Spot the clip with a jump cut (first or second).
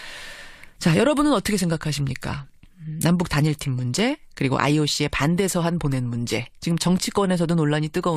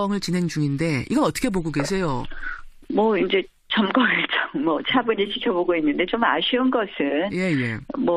first